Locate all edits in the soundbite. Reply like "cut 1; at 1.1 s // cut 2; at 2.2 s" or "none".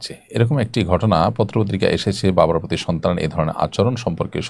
none